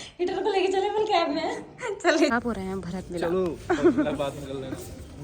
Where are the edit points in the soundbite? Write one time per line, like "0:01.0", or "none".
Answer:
0:02.3